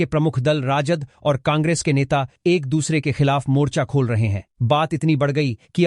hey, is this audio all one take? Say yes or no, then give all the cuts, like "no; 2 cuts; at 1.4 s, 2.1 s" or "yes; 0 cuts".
yes; 0 cuts